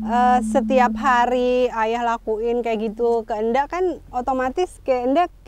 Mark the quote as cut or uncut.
uncut